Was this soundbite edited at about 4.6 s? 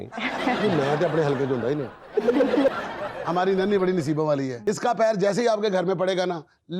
yes; 2 cuts; at 2.8 s, 4.6 s

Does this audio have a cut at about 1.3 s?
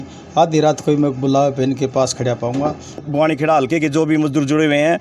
no; 1 cut; at 3.0 s

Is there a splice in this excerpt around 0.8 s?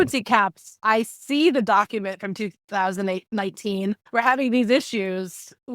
yes; 2 cuts; at 0.8 s, 4.0 s

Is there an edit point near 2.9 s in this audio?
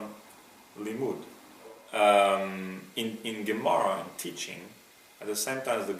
no; 1 cut; at 1.2 s

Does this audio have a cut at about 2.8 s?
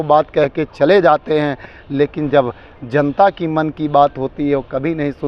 no; 0 cuts

